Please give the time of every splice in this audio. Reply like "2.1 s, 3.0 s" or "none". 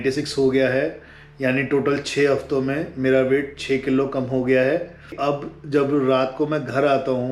5.2 s